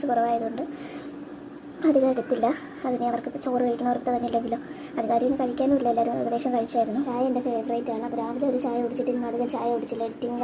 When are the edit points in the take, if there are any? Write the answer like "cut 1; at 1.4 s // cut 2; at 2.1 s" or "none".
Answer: cut 1; at 7.1 s

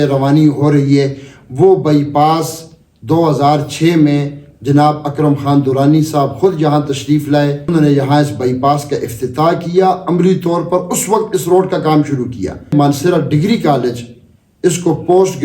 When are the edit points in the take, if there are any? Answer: cut 1; at 7.6 s // cut 2; at 12.7 s

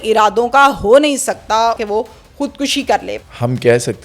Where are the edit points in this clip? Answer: cut 1; at 1.8 s // cut 2; at 3.2 s

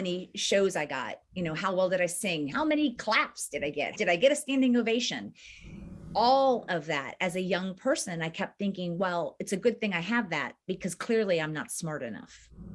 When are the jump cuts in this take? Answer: cut 1; at 2.5 s // cut 2; at 3.9 s

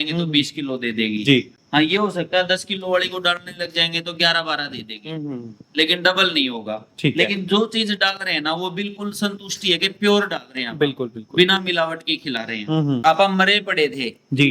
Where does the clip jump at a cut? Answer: cut 1; at 13.0 s

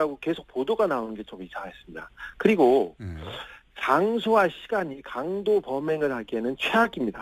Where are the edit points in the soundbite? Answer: cut 1; at 2.9 s

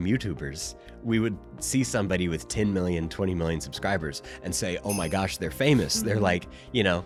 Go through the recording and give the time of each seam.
none

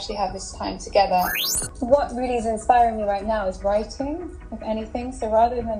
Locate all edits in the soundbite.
cut 1; at 1.4 s

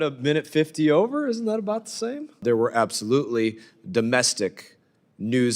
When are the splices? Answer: cut 1; at 2.4 s

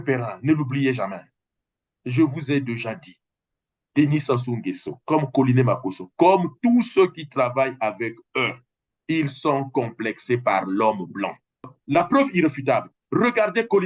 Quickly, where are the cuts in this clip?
cut 1; at 11.6 s

